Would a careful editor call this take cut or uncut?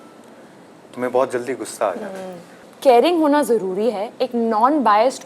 cut